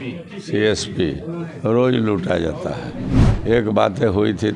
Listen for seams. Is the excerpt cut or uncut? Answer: cut